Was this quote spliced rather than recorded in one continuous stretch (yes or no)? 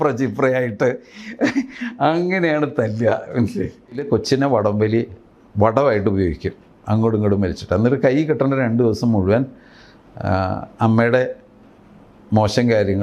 yes